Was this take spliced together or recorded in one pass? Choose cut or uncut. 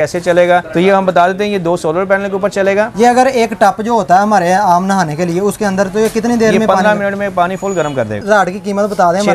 cut